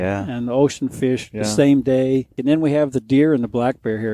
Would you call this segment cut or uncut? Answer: cut